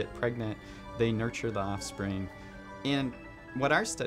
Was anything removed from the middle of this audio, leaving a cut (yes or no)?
yes